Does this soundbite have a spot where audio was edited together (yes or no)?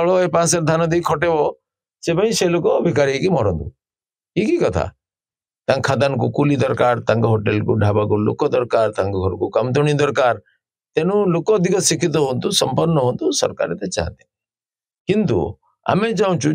yes